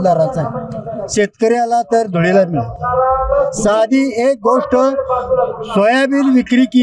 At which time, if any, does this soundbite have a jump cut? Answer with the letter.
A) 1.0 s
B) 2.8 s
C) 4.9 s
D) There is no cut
D